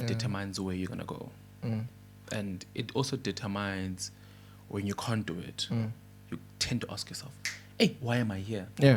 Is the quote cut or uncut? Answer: uncut